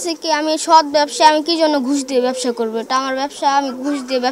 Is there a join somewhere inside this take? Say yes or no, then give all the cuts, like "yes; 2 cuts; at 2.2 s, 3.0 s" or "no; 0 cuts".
no; 0 cuts